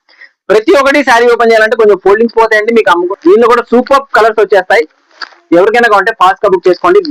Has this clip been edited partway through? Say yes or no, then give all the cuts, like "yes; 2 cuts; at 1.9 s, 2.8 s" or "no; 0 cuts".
yes; 1 cut; at 3.1 s